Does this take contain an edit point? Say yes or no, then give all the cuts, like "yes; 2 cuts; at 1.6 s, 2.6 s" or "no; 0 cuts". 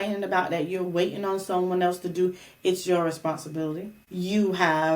yes; 1 cut; at 4.0 s